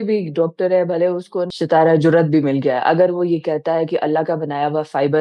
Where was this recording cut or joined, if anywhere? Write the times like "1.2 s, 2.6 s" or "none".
1.5 s